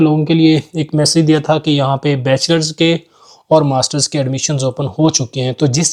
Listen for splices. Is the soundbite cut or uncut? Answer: uncut